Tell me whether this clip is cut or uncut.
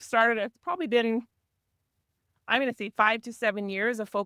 uncut